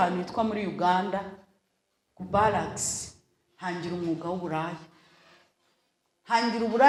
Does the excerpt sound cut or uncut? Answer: uncut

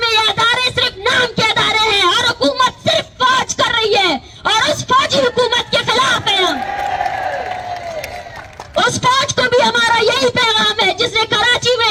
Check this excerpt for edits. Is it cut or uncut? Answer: uncut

